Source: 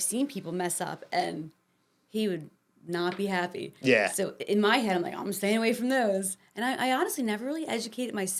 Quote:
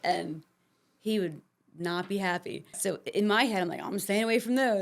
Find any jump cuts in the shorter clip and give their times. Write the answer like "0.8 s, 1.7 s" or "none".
2.7 s